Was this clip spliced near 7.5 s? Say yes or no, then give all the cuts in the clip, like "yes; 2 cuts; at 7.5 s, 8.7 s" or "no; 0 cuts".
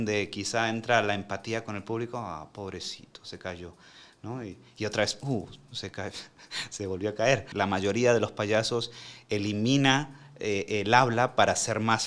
yes; 1 cut; at 7.5 s